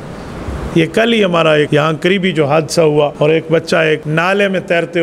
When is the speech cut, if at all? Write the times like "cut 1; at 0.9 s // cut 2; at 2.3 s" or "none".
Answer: cut 1; at 1.7 s // cut 2; at 3.1 s // cut 3; at 4.1 s